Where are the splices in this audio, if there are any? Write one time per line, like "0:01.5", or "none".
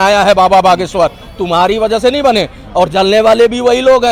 none